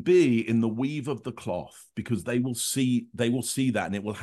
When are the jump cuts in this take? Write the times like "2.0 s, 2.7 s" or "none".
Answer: none